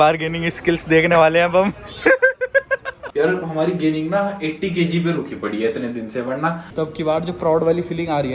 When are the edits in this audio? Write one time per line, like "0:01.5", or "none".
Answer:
0:03.0
0:06.7